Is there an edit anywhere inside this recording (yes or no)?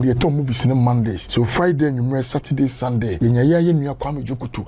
yes